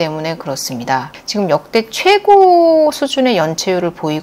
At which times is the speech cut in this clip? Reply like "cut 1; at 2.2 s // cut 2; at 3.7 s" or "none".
cut 1; at 1.2 s